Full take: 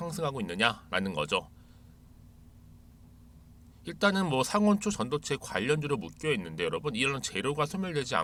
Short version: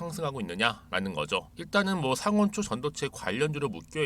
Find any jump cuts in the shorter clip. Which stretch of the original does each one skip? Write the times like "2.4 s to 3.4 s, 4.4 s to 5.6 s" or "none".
1.6 s to 3.8 s